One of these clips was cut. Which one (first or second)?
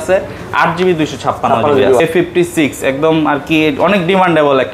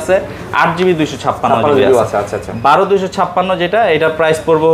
first